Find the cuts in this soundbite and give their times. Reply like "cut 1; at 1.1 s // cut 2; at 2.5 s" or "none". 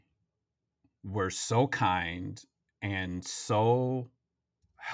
none